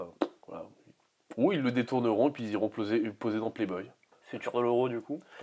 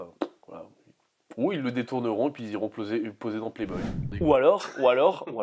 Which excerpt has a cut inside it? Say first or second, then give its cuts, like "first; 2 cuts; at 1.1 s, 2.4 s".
second; 1 cut; at 4.2 s